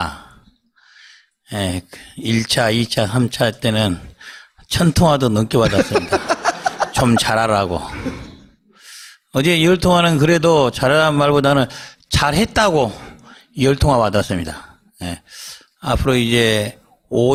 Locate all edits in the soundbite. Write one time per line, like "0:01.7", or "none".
none